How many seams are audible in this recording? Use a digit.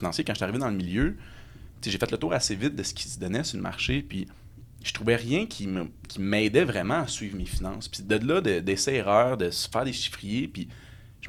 0